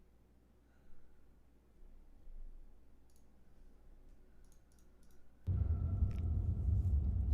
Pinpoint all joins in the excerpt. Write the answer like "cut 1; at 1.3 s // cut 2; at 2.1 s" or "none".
cut 1; at 1.9 s